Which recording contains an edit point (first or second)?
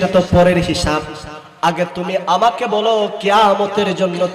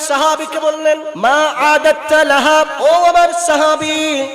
second